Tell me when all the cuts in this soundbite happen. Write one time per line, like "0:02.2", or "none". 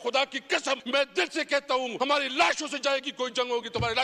0:00.8
0:01.9